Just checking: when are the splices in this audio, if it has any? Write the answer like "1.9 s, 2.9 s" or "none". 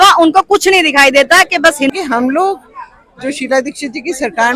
1.9 s